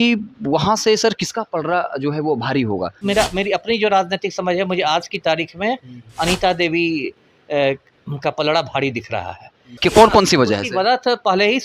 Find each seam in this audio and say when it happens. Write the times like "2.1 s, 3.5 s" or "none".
3.0 s, 9.6 s